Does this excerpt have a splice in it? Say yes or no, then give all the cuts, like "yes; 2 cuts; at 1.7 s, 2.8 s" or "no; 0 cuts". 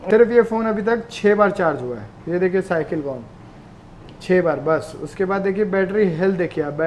no; 0 cuts